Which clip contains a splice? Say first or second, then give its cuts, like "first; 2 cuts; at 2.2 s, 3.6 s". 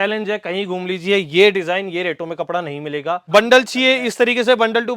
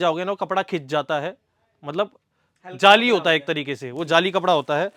first; 1 cut; at 3.2 s